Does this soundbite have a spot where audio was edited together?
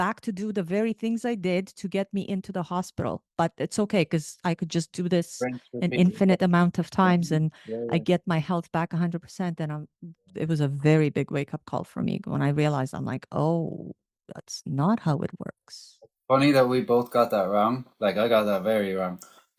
no; 0 cuts

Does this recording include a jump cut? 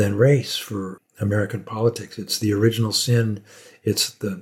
yes; 1 cut; at 0.9 s

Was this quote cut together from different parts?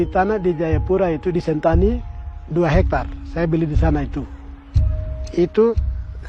no; 0 cuts

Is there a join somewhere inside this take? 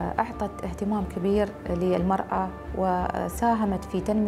no; 0 cuts

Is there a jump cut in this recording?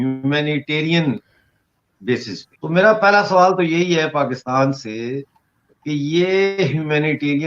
yes; 1 cut; at 2.4 s

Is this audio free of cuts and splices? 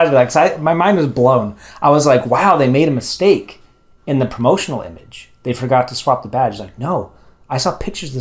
yes; 0 cuts

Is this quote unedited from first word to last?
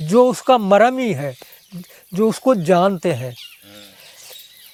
yes; 0 cuts

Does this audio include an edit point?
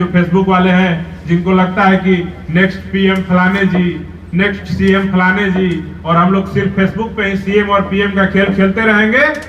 no; 0 cuts

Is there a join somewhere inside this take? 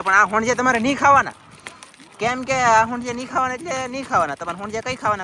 no; 0 cuts

